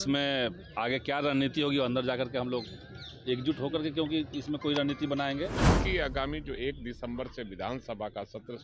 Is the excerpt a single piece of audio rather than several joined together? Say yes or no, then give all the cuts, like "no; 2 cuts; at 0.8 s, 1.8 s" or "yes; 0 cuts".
no; 1 cut; at 5.8 s